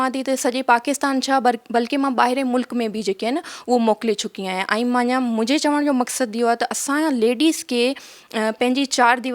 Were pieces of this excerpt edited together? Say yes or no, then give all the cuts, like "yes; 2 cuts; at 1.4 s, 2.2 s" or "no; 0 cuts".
no; 0 cuts